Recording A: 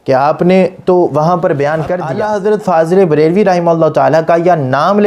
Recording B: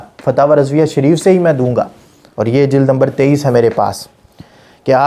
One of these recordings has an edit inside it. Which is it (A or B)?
A